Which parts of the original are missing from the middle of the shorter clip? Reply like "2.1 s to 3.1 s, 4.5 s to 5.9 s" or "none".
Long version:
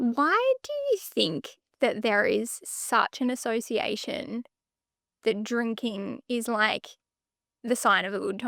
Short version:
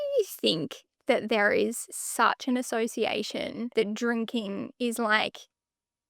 4.4 s to 5.2 s